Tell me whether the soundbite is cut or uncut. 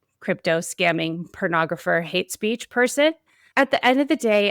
cut